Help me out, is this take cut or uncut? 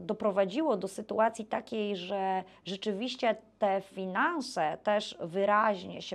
uncut